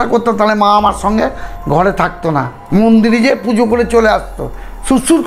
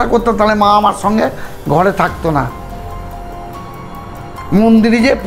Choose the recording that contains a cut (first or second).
first